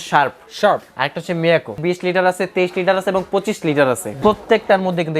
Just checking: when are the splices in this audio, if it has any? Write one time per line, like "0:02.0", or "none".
0:01.8
0:04.2

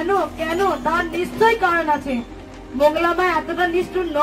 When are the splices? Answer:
none

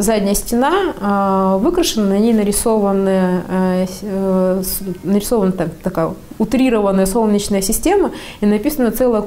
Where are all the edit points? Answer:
none

